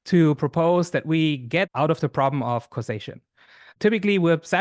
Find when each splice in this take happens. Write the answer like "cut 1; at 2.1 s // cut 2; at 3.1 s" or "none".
cut 1; at 1.7 s // cut 2; at 3.7 s